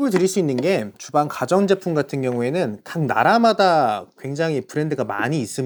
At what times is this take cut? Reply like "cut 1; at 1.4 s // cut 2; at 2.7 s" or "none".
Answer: none